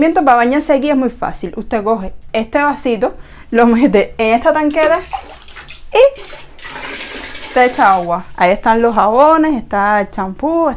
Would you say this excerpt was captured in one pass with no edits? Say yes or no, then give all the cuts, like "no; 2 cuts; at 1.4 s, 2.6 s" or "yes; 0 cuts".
yes; 0 cuts